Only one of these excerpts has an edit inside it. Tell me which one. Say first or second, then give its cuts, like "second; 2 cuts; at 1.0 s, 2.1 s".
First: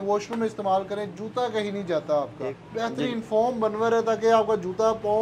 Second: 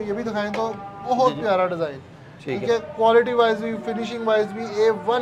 first; 1 cut; at 2.3 s